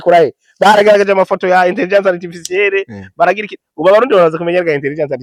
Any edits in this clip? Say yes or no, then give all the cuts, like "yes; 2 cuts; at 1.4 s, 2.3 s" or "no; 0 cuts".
no; 0 cuts